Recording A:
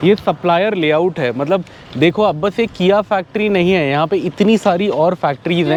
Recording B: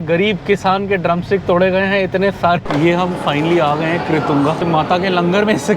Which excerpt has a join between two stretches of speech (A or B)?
B